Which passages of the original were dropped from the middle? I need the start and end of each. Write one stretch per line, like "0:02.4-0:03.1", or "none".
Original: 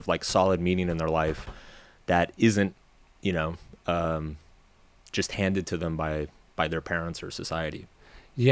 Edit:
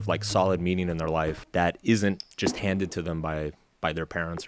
0:01.4-0:02.0
0:02.8-0:05.0